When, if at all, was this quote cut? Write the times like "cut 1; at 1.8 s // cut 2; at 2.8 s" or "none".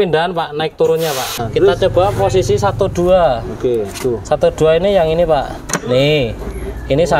cut 1; at 1.4 s

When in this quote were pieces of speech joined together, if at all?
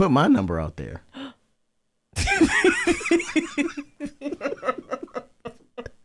none

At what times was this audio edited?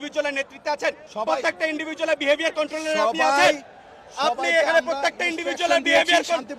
cut 1; at 1.1 s

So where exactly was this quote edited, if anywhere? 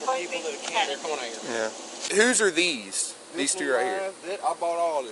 cut 1; at 2.1 s

